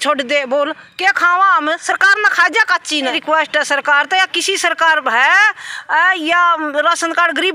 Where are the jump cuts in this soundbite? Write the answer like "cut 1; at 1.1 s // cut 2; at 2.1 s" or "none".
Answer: cut 1; at 3.2 s